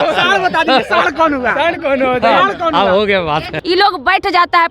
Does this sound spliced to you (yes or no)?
yes